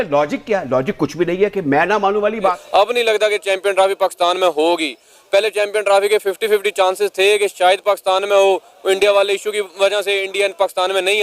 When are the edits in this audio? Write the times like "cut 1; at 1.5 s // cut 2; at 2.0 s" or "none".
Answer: cut 1; at 2.6 s